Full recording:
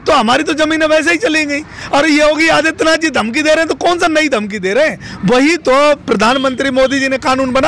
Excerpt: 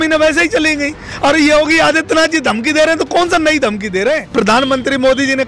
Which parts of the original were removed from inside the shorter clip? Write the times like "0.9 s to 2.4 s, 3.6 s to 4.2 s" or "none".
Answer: 5.0 s to 6.0 s